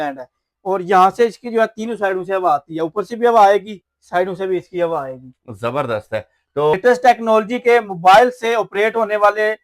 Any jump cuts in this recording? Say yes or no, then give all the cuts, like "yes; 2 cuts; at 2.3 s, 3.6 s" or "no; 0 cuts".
yes; 1 cut; at 6.7 s